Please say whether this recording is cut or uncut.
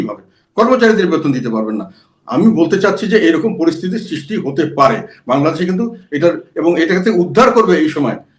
uncut